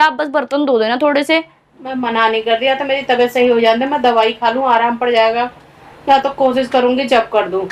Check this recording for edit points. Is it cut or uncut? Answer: uncut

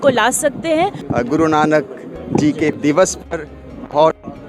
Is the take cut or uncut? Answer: cut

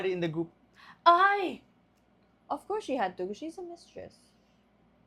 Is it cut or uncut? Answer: uncut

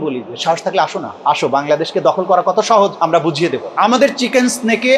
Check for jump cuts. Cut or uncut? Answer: cut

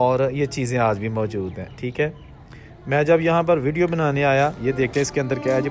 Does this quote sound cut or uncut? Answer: cut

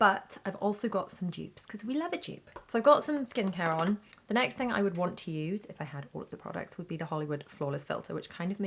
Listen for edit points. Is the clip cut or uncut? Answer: uncut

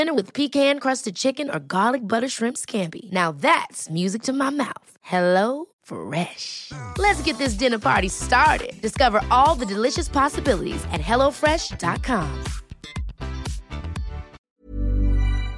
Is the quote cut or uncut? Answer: cut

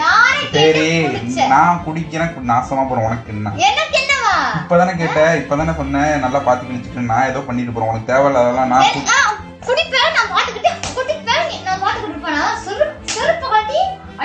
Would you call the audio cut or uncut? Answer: uncut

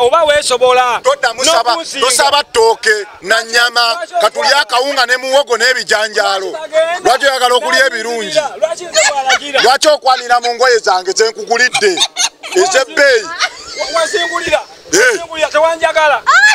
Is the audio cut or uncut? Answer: uncut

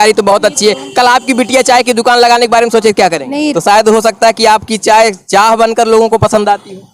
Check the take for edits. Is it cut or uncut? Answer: cut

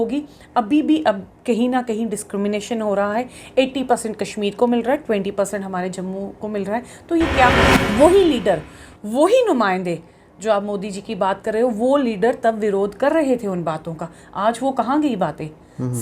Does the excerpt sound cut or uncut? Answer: cut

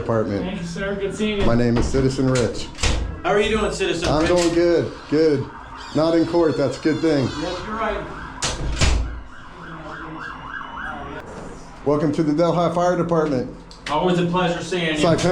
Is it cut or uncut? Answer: cut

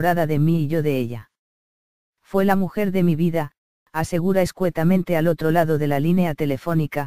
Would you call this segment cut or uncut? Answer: cut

